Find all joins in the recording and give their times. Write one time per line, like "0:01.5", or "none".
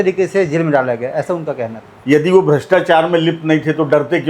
0:01.9